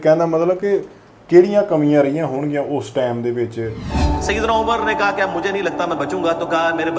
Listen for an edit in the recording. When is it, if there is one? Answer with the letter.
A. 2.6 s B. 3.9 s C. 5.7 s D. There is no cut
B